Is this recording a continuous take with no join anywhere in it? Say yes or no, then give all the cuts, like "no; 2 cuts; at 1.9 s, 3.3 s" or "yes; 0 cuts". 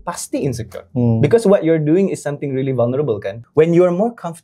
no; 1 cut; at 3.4 s